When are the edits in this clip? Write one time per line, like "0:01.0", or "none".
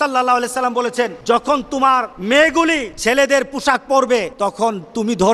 0:01.2
0:02.1
0:02.9
0:04.3